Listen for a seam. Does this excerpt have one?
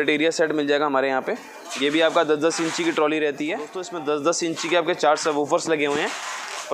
yes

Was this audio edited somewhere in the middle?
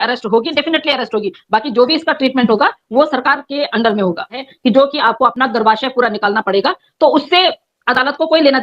yes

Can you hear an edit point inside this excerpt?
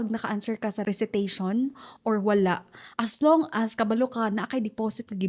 no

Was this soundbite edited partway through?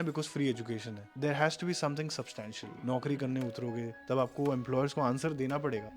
yes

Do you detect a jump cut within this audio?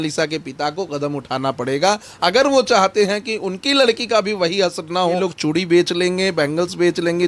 yes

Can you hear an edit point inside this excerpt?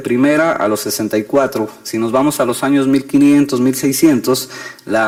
no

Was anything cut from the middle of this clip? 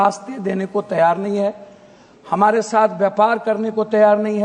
no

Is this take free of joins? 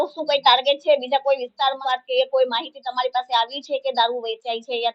no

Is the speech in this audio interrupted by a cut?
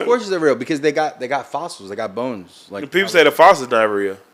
no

